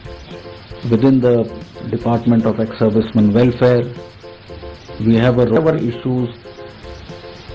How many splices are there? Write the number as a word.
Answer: one